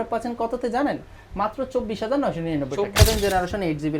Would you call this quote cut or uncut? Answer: cut